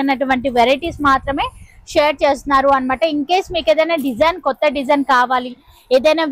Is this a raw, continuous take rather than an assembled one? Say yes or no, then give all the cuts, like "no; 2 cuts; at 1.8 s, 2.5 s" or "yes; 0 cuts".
yes; 0 cuts